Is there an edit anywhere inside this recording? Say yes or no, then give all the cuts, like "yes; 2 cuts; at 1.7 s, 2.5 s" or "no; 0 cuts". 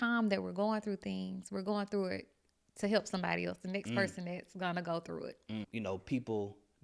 yes; 1 cut; at 5.7 s